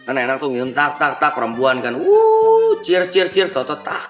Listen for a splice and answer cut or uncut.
uncut